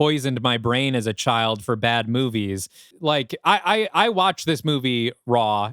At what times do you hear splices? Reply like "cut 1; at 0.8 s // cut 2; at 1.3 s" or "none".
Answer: cut 1; at 2.7 s